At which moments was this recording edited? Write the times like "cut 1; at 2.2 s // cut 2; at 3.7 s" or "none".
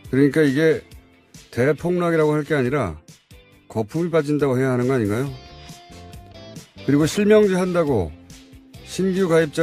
cut 1; at 7.6 s